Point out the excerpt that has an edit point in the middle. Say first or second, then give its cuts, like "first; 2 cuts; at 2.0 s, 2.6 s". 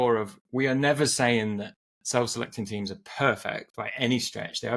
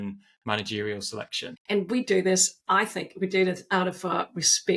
second; 1 cut; at 1.5 s